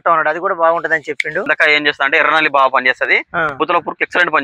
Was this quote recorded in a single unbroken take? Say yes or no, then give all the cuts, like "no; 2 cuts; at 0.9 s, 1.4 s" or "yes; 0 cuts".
no; 2 cuts; at 1.5 s, 3.5 s